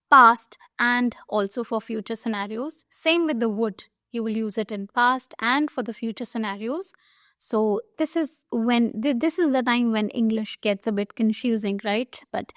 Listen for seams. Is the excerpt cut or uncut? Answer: uncut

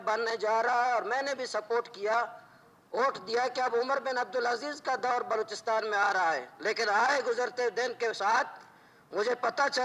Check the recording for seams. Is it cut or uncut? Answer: uncut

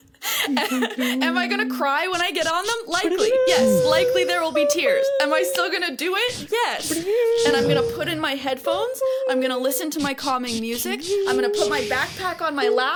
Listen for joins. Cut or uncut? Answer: uncut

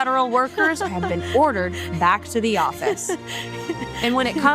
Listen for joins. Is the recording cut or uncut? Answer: uncut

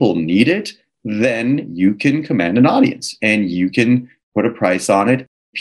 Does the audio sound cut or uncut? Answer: cut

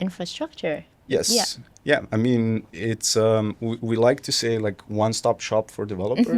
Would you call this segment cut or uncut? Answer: cut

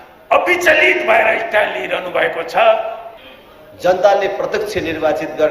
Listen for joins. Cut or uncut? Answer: cut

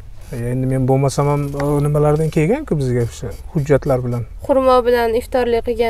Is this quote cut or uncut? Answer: uncut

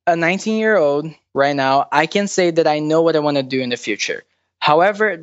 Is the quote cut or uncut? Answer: cut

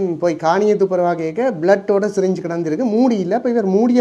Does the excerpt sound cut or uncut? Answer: uncut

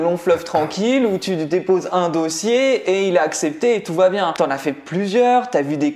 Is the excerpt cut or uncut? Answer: cut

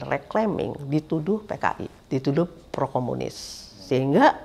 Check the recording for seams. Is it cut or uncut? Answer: cut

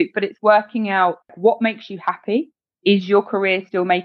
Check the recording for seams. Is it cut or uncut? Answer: cut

